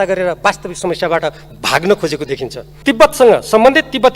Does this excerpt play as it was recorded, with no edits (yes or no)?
no